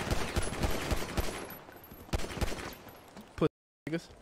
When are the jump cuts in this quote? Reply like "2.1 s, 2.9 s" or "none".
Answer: none